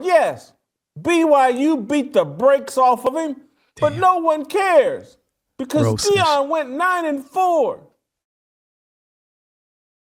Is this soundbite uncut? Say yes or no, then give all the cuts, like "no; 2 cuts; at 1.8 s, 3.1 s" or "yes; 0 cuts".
yes; 0 cuts